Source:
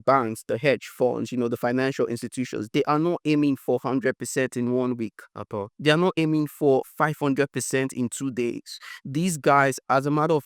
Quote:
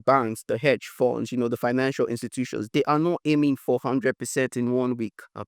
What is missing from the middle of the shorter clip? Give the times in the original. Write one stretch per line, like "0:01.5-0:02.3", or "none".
none